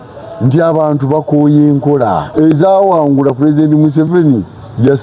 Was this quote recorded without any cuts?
no; 1 cut; at 2.3 s

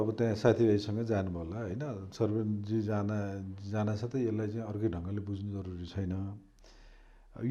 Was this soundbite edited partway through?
no; 0 cuts

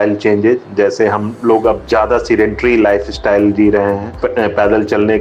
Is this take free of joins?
yes; 0 cuts

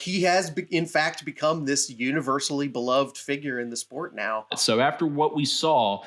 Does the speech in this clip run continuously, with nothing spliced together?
no; 1 cut; at 4.6 s

